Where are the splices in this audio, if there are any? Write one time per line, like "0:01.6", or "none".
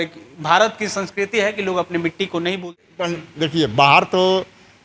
0:02.8